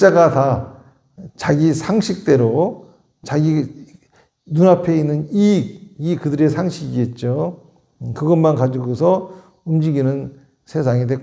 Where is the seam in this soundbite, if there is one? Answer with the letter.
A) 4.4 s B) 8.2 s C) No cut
C